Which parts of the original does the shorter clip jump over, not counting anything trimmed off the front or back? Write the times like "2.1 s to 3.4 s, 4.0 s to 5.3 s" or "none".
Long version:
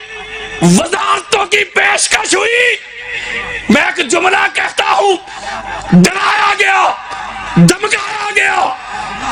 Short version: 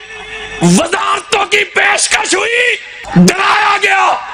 2.9 s to 5.7 s

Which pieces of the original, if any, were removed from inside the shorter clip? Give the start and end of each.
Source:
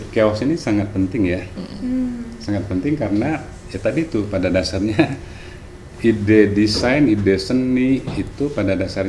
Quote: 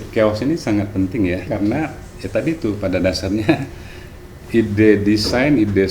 1.5 s to 3.0 s

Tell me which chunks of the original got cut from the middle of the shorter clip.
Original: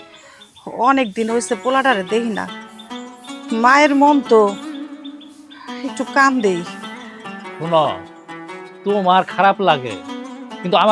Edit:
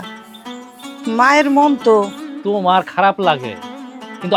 4.7 s to 8.7 s

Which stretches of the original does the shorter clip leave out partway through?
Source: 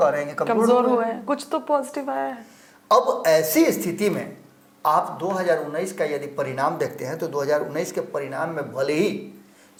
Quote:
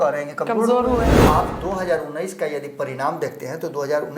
1.2 s to 4.8 s

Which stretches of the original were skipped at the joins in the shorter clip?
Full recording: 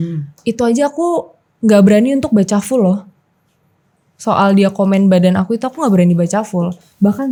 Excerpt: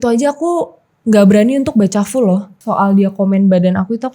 3.1 s to 4.1 s

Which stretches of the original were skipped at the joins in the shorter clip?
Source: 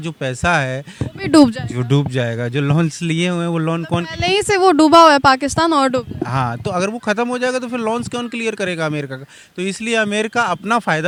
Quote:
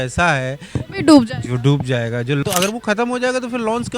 2.7 s to 6.6 s

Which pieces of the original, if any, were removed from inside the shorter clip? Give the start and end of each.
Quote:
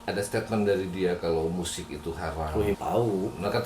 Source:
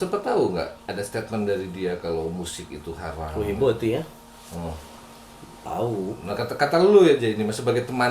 3.6 s to 5.6 s

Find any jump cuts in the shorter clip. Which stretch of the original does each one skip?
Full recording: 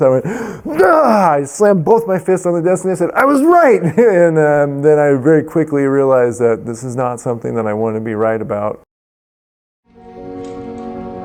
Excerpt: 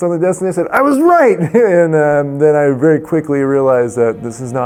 none

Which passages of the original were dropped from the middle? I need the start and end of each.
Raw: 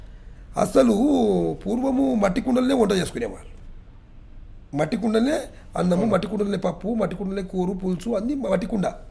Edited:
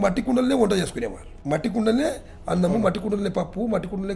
3.5 s to 4.6 s

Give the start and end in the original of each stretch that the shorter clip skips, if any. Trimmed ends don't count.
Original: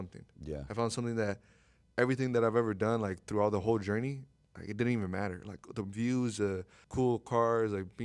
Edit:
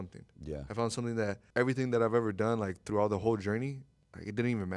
1.4 s to 1.8 s

